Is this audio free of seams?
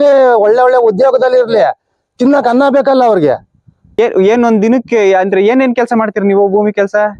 no; 1 cut; at 4.0 s

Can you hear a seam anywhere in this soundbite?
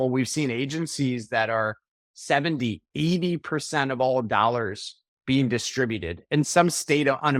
no; 0 cuts

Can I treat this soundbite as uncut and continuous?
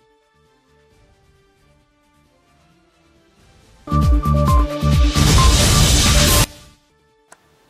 no; 1 cut; at 6.5 s

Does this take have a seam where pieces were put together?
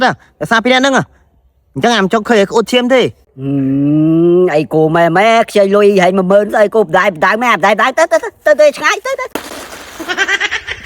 yes; 1 cut; at 9.8 s

